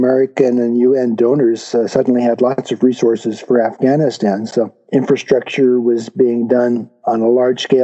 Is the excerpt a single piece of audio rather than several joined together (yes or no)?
yes